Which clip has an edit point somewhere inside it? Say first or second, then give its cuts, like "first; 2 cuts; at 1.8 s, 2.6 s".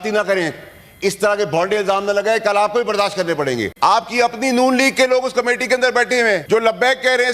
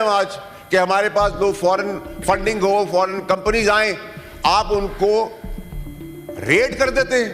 first; 2 cuts; at 3.9 s, 6.4 s